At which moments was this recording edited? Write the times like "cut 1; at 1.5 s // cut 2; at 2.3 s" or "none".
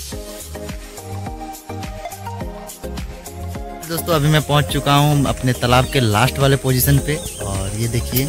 none